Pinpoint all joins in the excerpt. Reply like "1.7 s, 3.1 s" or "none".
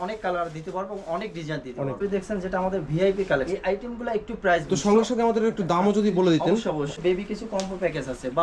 2.0 s, 3.5 s, 4.6 s, 6.9 s